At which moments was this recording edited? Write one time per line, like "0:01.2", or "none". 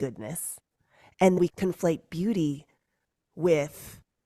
0:01.4